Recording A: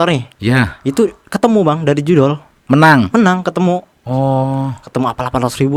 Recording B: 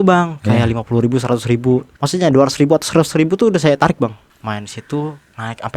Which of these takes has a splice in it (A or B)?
B